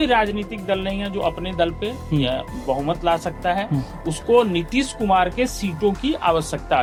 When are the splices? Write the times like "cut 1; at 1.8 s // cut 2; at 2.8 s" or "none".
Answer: none